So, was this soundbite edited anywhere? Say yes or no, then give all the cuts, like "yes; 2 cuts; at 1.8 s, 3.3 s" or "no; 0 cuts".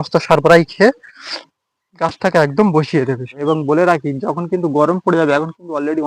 yes; 1 cut; at 3.3 s